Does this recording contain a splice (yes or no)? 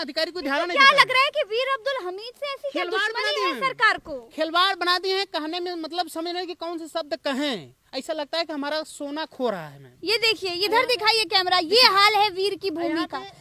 yes